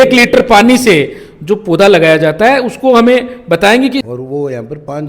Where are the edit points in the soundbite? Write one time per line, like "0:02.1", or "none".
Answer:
0:04.1